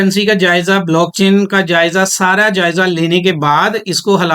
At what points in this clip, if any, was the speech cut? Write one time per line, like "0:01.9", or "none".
none

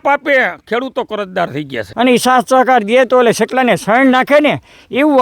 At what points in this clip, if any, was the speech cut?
0:01.8

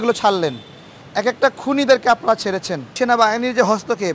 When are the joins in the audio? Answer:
0:02.9

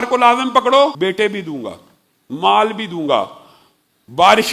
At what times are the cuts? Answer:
0:00.9

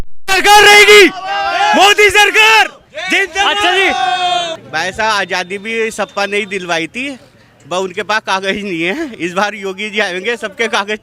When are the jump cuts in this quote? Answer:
0:04.6

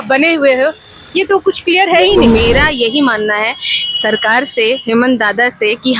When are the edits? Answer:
0:02.2

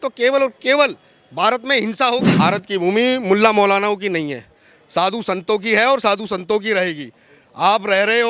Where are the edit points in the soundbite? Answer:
0:02.3

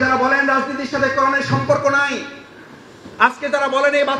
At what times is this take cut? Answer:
none

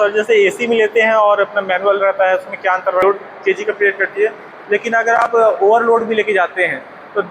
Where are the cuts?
0:03.0

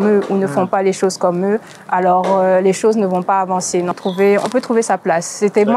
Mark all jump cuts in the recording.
0:03.9

